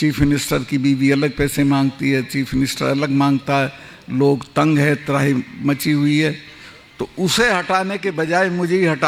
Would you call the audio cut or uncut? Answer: uncut